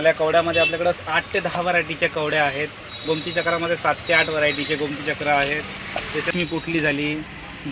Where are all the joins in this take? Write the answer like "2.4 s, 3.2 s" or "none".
6.3 s